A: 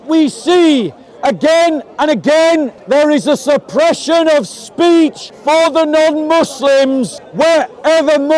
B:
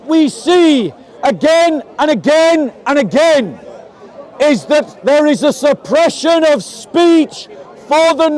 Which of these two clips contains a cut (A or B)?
A